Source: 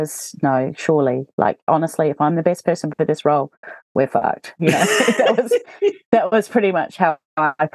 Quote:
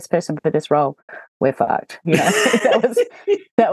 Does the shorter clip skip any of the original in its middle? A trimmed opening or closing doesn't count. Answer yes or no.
no